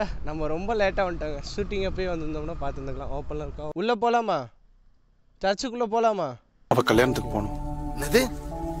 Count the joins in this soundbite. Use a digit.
1